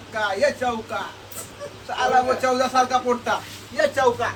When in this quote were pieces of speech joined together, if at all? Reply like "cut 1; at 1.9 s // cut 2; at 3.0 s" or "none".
none